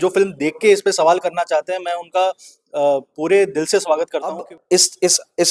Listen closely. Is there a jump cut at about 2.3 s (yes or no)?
no